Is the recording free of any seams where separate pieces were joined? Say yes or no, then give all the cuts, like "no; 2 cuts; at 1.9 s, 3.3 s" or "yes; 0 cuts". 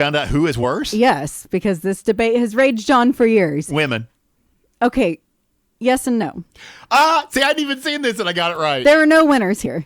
yes; 0 cuts